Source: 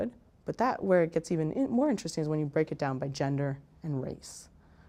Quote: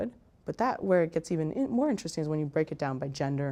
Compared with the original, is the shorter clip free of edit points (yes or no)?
yes